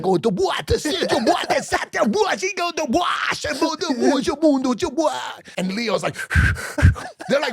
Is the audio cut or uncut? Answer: cut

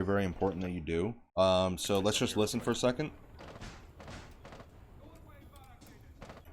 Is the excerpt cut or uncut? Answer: cut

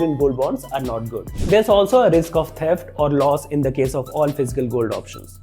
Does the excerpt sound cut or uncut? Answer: cut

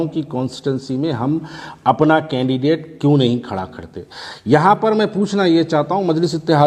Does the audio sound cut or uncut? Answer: uncut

